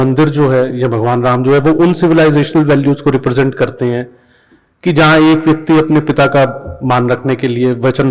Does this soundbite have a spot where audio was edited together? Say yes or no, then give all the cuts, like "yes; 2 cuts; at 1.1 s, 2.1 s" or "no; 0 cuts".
no; 0 cuts